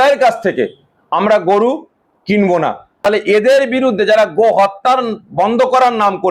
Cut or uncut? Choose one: cut